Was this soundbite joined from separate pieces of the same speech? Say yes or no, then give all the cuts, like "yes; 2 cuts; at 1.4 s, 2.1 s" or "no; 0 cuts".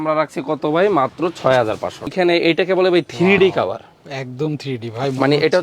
yes; 1 cut; at 2.1 s